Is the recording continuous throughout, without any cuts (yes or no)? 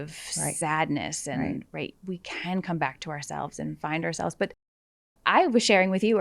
yes